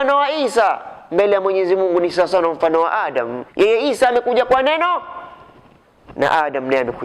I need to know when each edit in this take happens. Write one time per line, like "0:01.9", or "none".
0:03.4